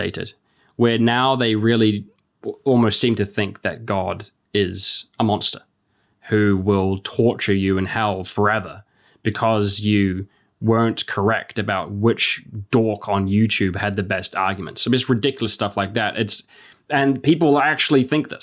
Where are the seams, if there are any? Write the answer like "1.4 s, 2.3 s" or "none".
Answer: none